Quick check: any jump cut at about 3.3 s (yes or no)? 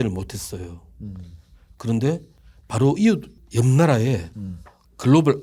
no